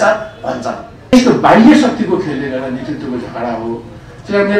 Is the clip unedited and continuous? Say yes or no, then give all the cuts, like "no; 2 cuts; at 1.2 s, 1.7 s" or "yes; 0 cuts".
no; 1 cut; at 1.1 s